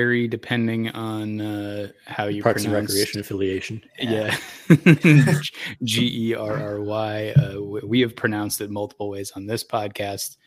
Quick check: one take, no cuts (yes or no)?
yes